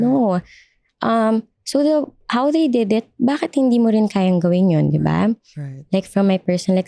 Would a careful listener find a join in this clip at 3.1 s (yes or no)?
no